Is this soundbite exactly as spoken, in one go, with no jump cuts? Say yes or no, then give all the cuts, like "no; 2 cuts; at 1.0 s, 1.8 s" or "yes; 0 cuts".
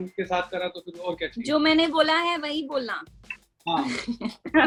yes; 0 cuts